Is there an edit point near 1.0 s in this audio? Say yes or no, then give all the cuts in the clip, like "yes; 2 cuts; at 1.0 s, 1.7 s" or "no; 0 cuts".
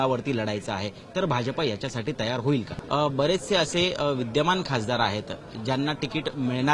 no; 1 cut; at 2.8 s